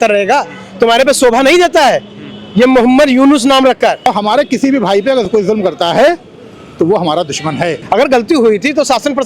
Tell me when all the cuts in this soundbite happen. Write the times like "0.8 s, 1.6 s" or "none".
4.1 s, 7.8 s